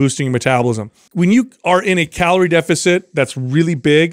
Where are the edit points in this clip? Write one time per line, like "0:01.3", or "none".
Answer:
0:01.0